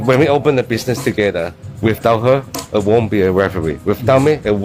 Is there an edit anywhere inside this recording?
no; 0 cuts

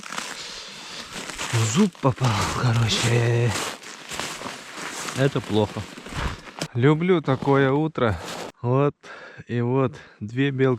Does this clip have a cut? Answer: yes; 2 cuts; at 6.6 s, 8.5 s

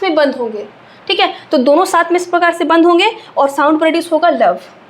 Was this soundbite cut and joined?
no; 0 cuts

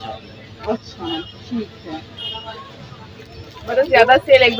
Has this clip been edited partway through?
no; 0 cuts

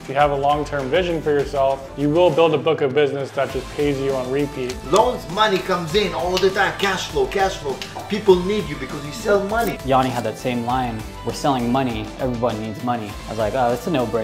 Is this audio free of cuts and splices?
no; 3 cuts; at 1.9 s, 4.7 s, 9.8 s

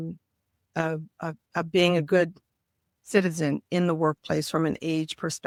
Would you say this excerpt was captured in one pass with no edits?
yes; 0 cuts

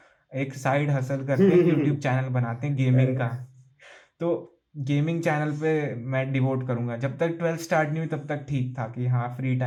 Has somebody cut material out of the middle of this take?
no; 0 cuts

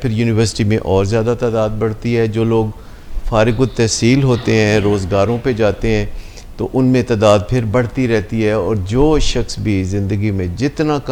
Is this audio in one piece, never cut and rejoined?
yes; 0 cuts

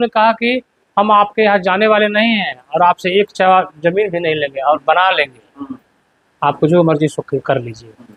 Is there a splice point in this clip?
no; 0 cuts

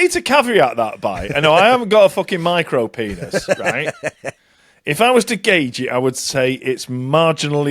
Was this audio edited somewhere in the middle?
no; 0 cuts

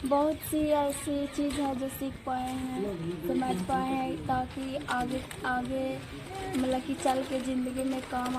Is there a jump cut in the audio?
no; 0 cuts

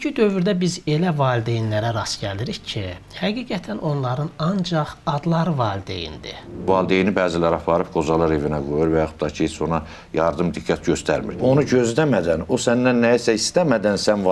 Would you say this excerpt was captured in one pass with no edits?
no; 2 cuts; at 6.7 s, 11.4 s

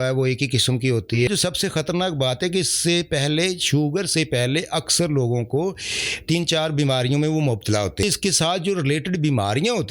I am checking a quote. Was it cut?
yes; 2 cuts; at 1.3 s, 8.0 s

